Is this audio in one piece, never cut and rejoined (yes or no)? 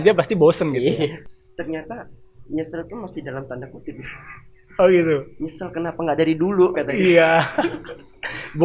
no